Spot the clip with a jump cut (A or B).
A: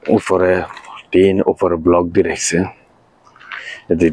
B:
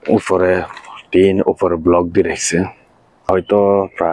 B